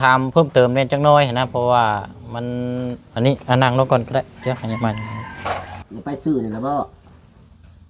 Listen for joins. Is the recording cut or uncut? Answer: cut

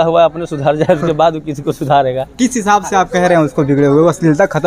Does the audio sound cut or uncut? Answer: uncut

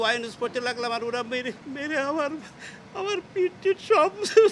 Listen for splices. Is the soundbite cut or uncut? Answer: uncut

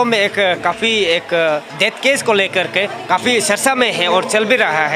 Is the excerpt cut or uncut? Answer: cut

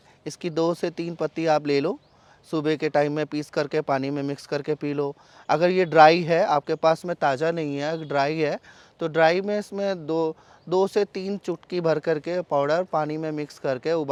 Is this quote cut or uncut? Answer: uncut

